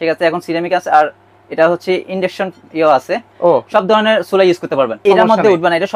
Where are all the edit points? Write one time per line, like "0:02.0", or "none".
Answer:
0:05.0